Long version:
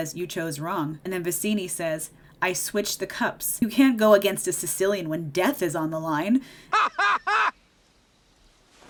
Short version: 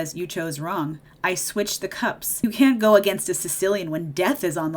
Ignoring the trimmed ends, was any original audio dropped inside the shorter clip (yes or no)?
yes